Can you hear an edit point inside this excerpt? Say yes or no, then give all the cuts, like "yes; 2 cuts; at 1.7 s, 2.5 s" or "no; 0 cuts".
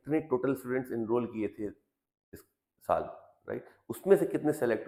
no; 0 cuts